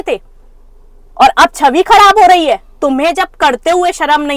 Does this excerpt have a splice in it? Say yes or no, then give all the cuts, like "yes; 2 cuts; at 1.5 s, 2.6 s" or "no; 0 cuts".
no; 0 cuts